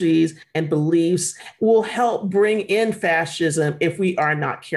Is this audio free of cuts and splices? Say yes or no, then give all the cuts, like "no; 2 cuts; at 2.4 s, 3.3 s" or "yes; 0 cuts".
no; 1 cut; at 1.4 s